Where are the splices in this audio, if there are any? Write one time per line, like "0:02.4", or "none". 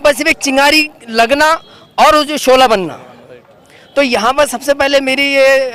none